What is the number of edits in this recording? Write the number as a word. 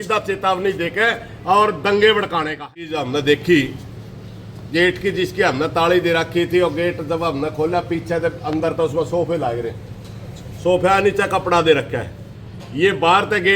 one